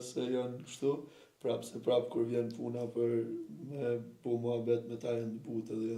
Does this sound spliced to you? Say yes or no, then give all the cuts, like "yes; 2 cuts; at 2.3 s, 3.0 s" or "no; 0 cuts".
no; 0 cuts